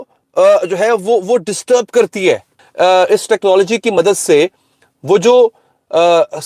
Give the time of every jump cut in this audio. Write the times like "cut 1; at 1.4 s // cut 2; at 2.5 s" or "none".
cut 1; at 2.6 s